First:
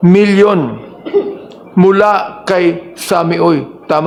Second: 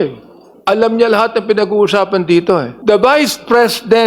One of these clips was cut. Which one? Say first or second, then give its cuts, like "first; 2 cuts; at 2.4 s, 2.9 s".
second; 1 cut; at 2.7 s